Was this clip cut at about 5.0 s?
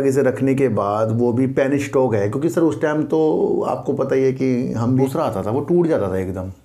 yes; 1 cut; at 5.0 s

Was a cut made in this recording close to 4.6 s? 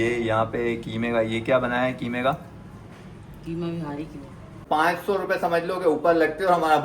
yes; 1 cut; at 4.6 s

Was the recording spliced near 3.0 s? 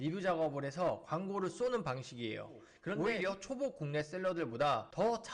yes; 1 cut; at 3.0 s

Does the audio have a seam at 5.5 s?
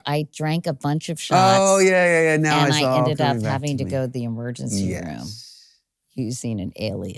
no; 0 cuts

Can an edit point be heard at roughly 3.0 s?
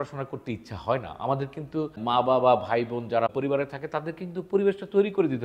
no; 0 cuts

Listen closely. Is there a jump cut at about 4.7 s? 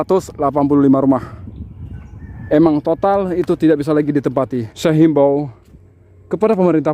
yes; 1 cut; at 4.7 s

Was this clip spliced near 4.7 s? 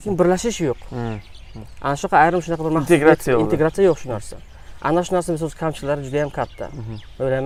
no; 0 cuts

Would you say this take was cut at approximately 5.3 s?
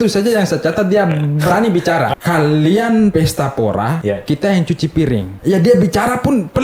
yes; 4 cuts; at 2.1 s, 3.1 s, 4.0 s, 5.3 s

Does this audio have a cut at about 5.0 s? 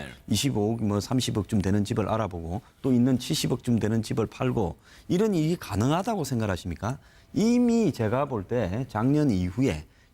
yes; 1 cut; at 5.0 s

